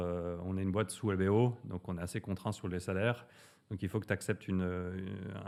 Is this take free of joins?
yes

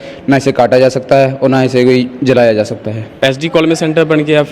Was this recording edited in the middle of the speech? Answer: yes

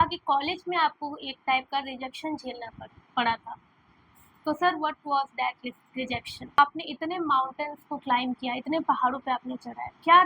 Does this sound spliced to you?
yes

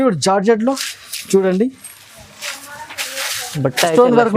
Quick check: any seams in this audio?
no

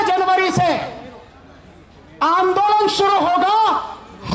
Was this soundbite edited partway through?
no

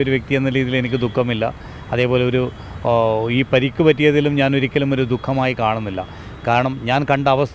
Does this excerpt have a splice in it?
no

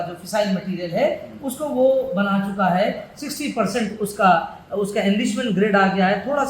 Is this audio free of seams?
yes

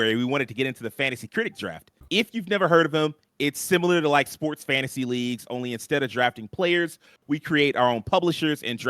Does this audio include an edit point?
yes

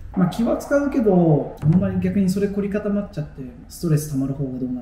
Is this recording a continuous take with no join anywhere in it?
no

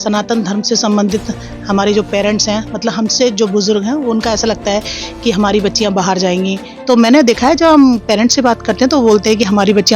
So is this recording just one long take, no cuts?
no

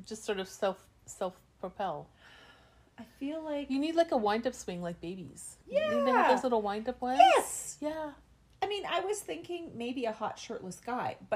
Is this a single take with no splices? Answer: yes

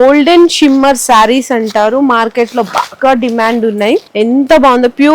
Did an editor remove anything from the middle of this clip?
yes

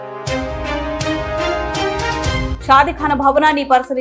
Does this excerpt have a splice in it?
yes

